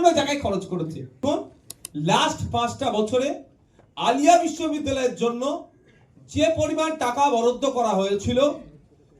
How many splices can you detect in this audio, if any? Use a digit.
1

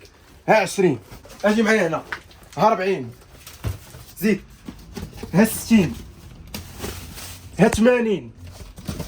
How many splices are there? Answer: 0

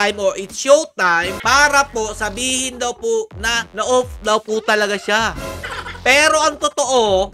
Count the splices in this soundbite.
0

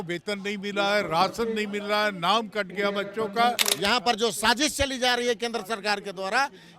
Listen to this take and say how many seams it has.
1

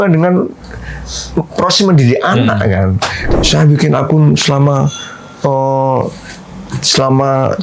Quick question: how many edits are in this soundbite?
1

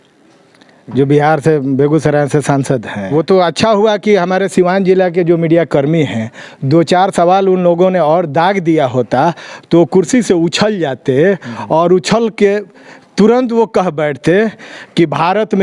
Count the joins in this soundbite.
1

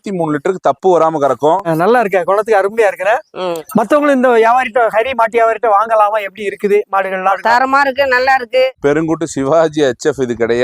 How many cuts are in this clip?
2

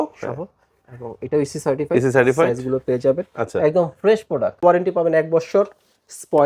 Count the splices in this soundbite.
1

